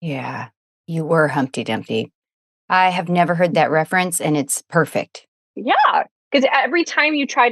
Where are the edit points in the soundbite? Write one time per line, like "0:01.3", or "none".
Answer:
0:05.5